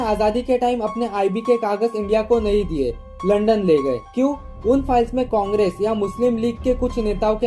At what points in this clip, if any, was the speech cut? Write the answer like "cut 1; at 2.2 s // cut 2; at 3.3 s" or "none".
none